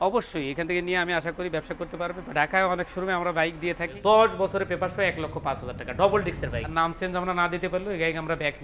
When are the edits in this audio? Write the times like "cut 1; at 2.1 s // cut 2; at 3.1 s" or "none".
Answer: cut 1; at 3.9 s // cut 2; at 6.6 s